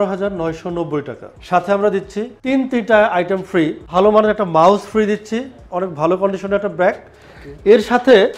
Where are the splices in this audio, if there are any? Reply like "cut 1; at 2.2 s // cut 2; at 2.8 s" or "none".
cut 1; at 3.9 s // cut 2; at 5.6 s